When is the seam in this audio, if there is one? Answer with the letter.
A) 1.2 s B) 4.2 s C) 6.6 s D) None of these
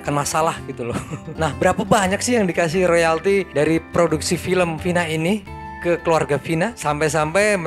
A